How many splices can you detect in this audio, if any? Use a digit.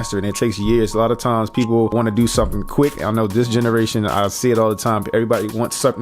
1